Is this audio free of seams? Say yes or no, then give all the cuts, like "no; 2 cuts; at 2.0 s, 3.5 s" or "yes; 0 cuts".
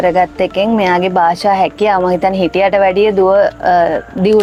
yes; 0 cuts